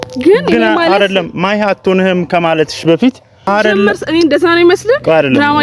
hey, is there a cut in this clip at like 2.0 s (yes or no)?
no